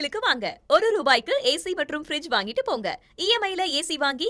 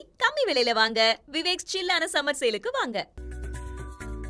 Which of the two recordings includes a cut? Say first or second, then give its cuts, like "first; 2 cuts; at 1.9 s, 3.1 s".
second; 1 cut; at 3.1 s